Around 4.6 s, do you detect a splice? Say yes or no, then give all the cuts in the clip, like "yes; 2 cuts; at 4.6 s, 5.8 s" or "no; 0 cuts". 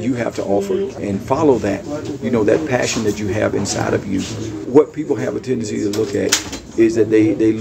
yes; 2 cuts; at 1.0 s, 4.6 s